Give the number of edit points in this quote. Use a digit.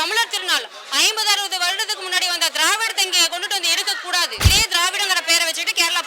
1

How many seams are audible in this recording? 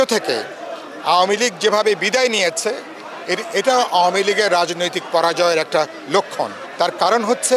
1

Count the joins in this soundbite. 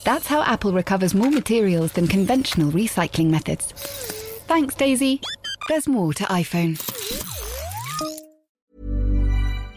1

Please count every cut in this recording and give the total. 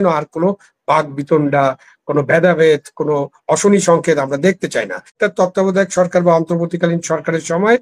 1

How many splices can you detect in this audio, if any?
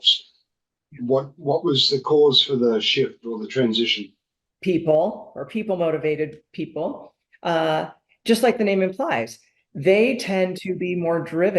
1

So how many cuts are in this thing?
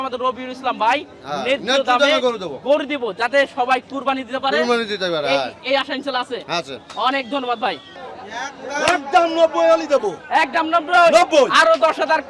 1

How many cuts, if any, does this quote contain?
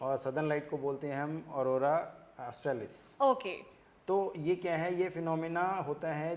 0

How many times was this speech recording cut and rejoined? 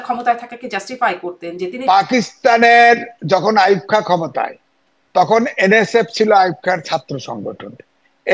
1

